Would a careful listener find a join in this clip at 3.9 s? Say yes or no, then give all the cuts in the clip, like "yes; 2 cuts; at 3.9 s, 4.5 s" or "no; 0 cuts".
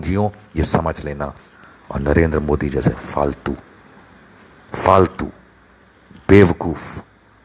no; 1 cut; at 1.5 s